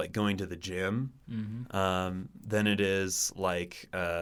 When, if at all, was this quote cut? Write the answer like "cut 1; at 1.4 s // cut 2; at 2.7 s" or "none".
none